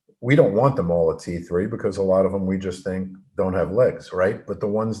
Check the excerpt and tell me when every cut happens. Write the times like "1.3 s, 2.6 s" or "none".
none